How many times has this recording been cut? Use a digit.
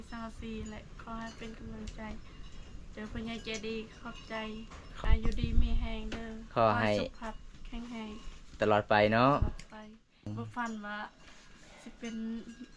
2